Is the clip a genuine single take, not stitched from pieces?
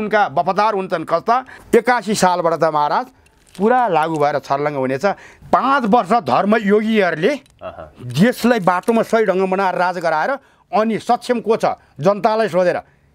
no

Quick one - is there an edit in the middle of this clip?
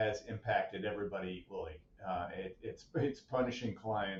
no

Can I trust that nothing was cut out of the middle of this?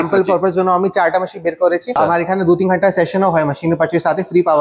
no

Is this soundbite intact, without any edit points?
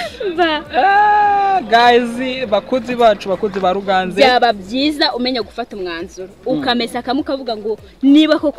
yes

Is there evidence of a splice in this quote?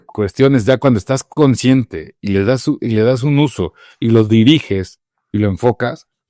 no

